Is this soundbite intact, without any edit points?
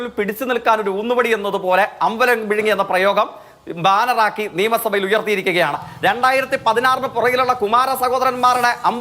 no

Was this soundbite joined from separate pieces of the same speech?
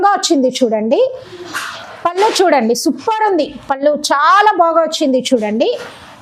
no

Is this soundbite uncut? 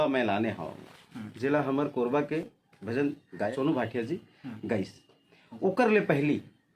yes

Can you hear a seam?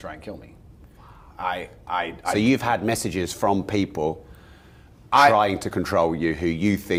no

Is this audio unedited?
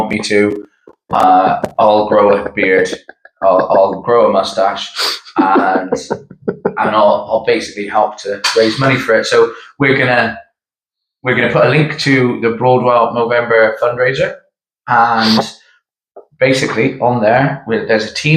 yes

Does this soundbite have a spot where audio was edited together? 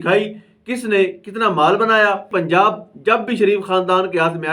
yes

